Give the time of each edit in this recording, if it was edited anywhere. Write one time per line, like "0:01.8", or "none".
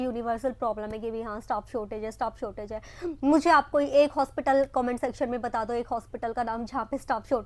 none